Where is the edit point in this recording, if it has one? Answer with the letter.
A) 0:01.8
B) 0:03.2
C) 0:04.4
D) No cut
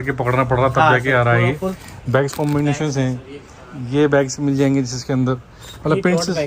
A